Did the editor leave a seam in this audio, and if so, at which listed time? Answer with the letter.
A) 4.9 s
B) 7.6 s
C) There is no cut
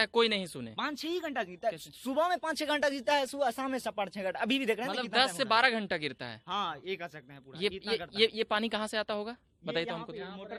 C